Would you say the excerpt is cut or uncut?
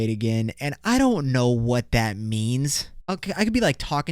cut